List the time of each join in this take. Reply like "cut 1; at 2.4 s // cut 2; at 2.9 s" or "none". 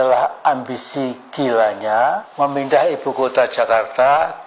none